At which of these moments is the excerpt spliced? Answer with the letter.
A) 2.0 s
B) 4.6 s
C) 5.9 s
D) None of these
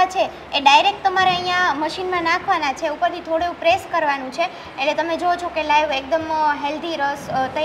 D